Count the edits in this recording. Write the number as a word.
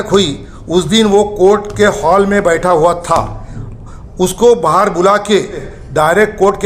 one